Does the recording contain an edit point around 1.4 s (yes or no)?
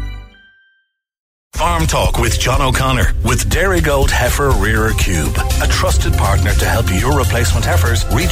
yes